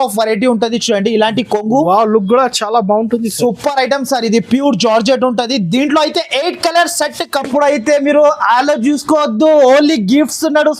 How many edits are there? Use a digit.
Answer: 1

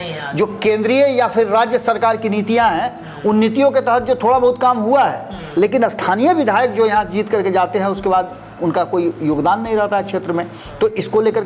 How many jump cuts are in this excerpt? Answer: 0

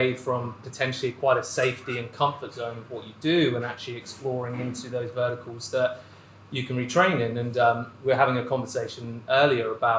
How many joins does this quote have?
0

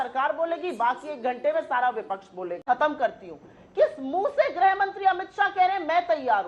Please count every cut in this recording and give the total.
1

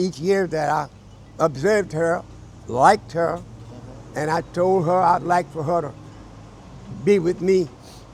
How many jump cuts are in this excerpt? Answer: 0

